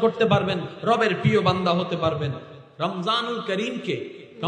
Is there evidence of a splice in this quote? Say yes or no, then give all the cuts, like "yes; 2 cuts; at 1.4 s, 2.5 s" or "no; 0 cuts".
yes; 1 cut; at 2.5 s